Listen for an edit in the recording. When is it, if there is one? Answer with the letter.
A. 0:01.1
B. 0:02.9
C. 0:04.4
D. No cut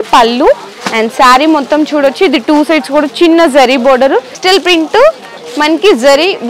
C